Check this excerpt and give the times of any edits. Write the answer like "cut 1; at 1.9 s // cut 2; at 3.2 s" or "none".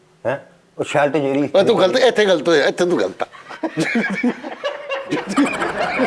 none